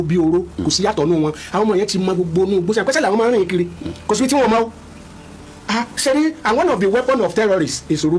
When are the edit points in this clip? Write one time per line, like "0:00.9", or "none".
none